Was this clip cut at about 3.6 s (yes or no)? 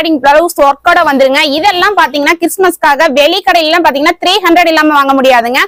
no